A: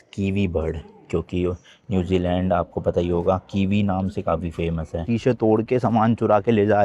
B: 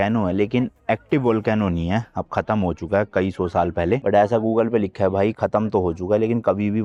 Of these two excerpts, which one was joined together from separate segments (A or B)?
A